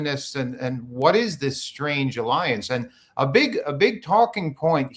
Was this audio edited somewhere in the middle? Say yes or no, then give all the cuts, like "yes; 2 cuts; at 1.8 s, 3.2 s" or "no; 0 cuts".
no; 0 cuts